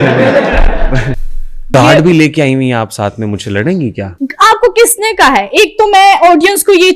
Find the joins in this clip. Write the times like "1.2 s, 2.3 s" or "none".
1.6 s, 4.1 s

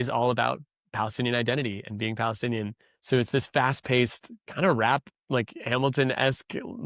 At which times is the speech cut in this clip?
none

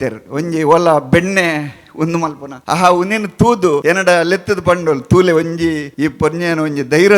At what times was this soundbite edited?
2.5 s, 3.8 s, 5.9 s

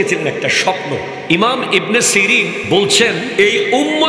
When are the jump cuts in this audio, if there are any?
1.2 s, 2.6 s, 3.3 s

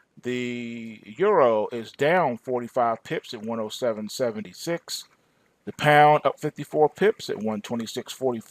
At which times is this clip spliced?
6.4 s

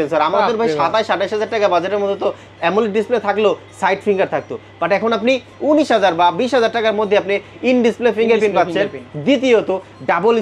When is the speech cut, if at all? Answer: none

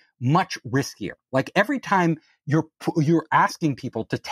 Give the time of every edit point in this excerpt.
none

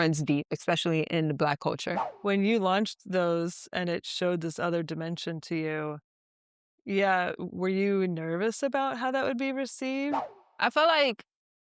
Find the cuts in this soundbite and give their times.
2.1 s

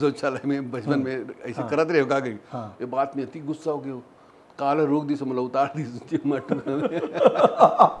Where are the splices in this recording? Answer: none

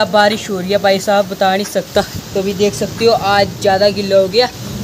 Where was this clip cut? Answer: 2.2 s

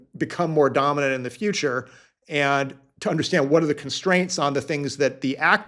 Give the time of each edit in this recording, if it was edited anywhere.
none

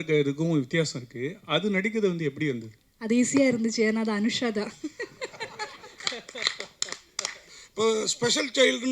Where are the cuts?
7.6 s

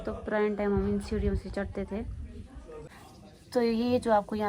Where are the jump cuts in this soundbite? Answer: 2.9 s

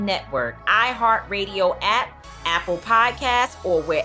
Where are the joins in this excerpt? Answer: none

